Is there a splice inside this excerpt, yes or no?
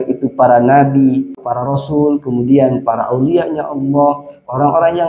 yes